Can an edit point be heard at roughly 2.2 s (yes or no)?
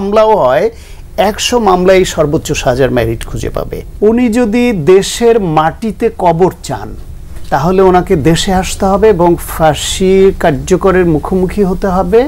no